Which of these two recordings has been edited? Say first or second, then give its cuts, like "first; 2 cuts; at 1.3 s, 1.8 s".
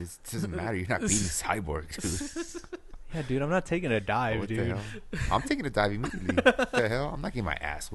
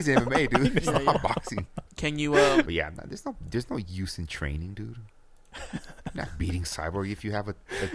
second; 1 cut; at 2.7 s